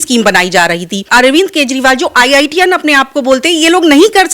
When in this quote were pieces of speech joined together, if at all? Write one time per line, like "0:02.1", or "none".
0:01.1